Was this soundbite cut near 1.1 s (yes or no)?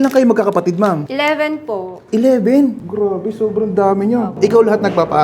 yes